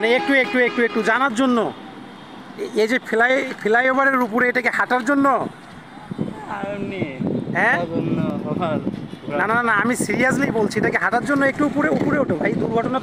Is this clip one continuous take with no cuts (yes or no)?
yes